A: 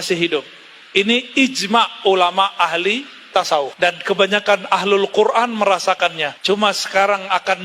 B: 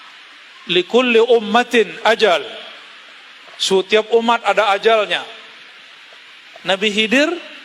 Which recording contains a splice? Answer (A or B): A